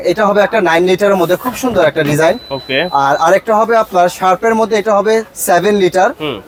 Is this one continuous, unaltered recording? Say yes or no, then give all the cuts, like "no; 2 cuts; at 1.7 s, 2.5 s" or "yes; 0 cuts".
yes; 0 cuts